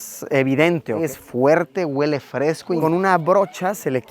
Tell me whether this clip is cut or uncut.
cut